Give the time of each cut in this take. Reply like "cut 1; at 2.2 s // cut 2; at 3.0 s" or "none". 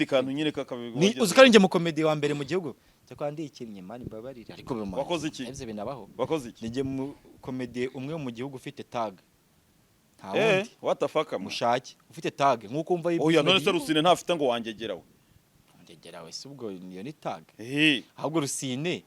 none

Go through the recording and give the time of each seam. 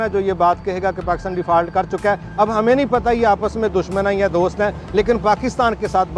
none

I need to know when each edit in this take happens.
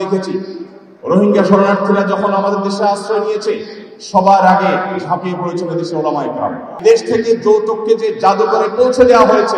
cut 1; at 6.7 s

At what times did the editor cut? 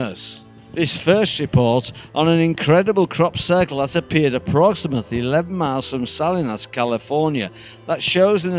none

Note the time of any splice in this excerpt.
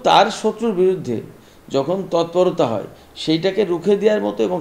none

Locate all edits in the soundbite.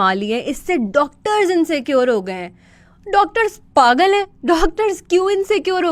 none

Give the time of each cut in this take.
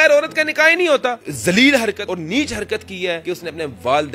cut 1; at 1.3 s // cut 2; at 2.0 s // cut 3; at 3.2 s

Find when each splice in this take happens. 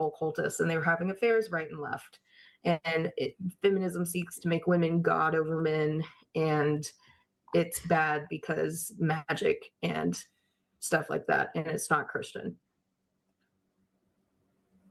none

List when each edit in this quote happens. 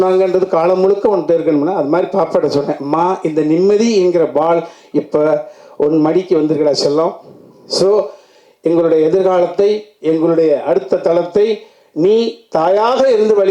none

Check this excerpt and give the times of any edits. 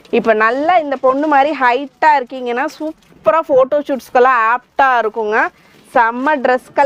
none

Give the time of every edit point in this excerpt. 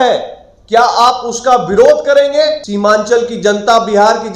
cut 1; at 2.7 s

